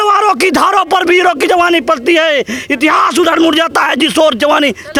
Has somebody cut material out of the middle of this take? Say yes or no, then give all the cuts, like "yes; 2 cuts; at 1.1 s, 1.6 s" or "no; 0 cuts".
no; 0 cuts